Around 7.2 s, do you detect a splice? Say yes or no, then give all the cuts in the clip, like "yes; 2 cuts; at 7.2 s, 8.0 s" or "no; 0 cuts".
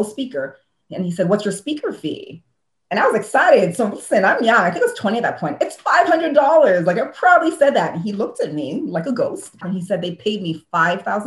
no; 1 cut; at 9.6 s